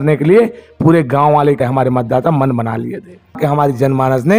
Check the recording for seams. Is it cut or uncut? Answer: cut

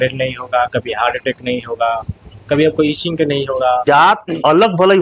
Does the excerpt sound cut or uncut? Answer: cut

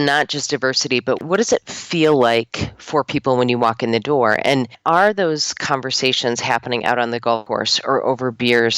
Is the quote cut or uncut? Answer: cut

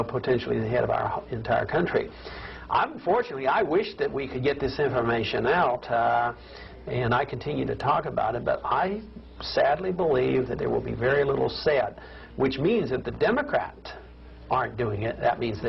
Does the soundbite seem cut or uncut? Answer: uncut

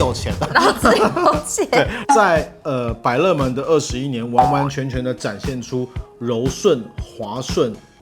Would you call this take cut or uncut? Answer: cut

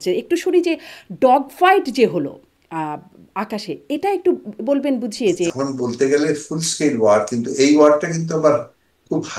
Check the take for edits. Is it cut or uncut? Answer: cut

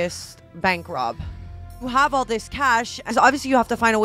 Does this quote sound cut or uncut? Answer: cut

